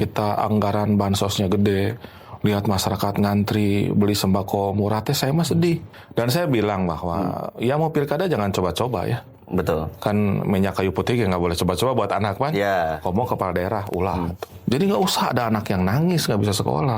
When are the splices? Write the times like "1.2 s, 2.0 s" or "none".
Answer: 5.9 s, 14.5 s

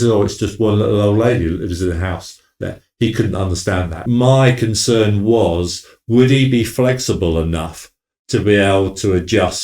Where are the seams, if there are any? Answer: 4.0 s

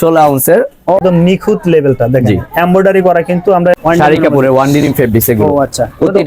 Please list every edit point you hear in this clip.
1.0 s, 3.7 s

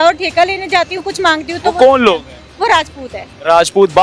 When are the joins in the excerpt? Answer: none

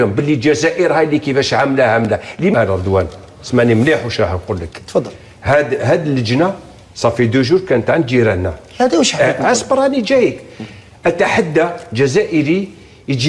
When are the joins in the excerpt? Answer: 2.2 s

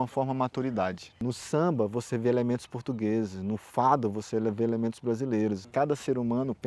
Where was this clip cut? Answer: 1.2 s, 5.6 s

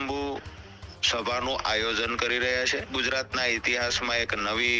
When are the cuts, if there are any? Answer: 2.9 s

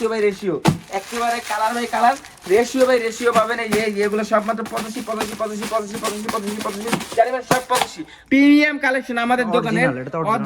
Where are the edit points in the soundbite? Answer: 8.1 s

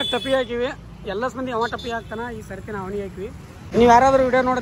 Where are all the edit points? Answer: 3.7 s

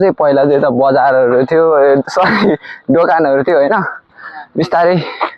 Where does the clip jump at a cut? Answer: none

